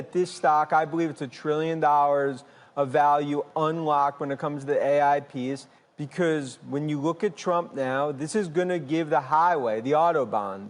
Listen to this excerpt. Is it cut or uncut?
uncut